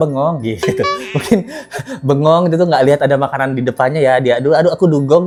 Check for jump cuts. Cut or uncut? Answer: uncut